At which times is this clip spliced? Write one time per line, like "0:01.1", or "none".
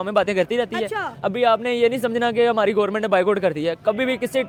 none